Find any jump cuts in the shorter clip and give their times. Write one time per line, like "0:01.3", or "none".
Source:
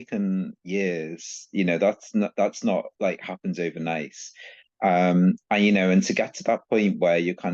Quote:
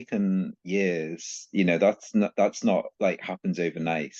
none